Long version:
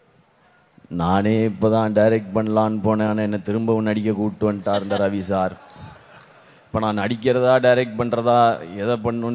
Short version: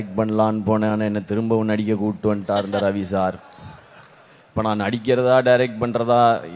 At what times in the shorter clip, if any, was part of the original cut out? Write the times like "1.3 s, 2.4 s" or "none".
none